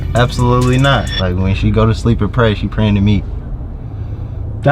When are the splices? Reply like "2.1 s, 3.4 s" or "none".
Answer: 1.1 s